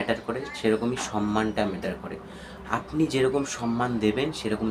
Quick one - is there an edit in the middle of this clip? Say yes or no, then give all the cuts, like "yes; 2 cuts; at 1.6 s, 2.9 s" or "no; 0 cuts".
no; 0 cuts